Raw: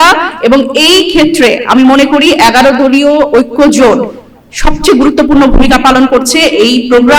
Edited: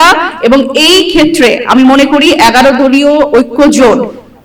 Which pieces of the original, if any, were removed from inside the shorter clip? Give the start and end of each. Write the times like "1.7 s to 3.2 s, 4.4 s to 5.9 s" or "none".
none